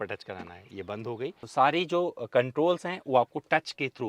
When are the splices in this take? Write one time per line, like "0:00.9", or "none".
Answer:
0:01.4